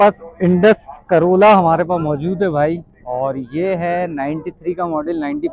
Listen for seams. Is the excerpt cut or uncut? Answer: uncut